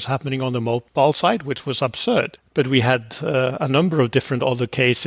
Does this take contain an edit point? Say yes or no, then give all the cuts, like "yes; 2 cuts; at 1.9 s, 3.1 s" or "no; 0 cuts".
no; 0 cuts